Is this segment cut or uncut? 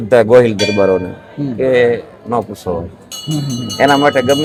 uncut